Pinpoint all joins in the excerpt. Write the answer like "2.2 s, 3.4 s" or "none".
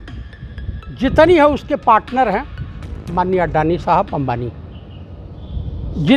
none

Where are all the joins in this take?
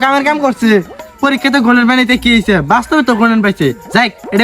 none

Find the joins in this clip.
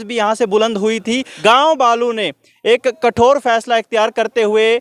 1.3 s

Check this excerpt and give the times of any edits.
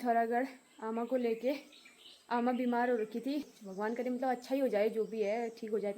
3.5 s

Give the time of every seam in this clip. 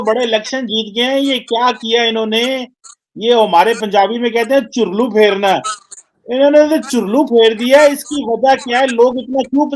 none

